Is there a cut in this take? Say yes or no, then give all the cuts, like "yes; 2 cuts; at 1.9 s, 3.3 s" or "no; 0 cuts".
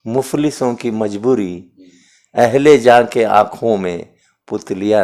no; 0 cuts